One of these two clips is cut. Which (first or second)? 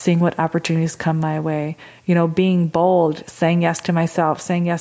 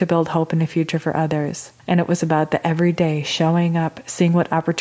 second